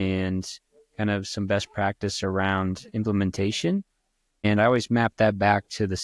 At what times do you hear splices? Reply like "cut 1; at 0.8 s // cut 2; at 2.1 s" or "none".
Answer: cut 1; at 4.4 s